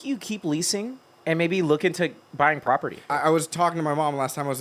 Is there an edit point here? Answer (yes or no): yes